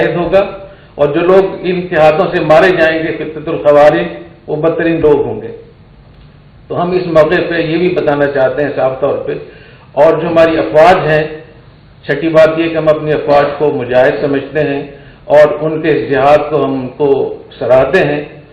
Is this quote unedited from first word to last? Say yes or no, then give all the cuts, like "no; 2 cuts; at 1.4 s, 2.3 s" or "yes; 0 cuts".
yes; 0 cuts